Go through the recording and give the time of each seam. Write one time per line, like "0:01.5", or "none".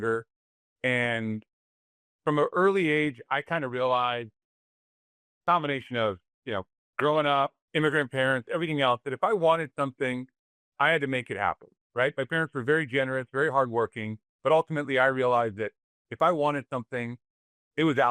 0:06.8
0:07.6